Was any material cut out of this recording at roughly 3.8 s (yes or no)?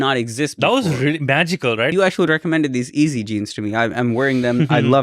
no